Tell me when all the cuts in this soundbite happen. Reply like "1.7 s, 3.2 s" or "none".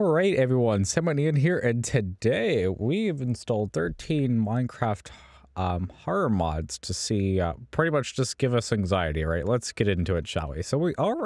none